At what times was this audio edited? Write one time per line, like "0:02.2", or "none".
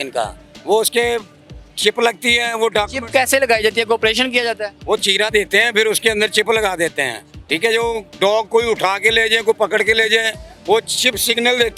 none